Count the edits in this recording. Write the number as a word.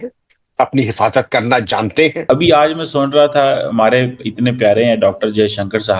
one